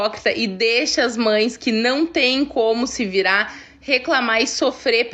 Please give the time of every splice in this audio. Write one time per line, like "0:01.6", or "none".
none